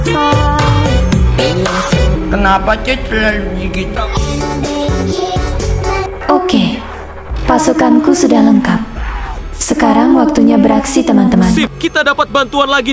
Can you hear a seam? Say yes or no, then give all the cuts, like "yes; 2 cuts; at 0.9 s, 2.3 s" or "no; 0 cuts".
yes; 1 cut; at 11.6 s